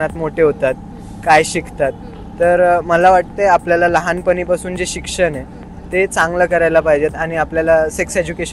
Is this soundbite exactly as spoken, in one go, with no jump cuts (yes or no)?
yes